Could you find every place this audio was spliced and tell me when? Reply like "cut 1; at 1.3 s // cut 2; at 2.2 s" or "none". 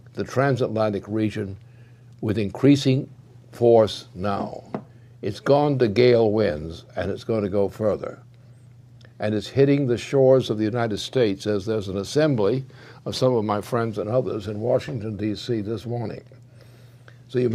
none